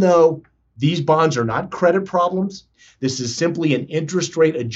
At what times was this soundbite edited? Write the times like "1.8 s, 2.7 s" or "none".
2.7 s